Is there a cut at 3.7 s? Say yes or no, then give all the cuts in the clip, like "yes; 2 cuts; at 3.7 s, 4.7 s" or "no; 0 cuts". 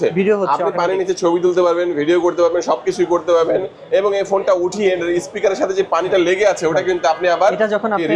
no; 0 cuts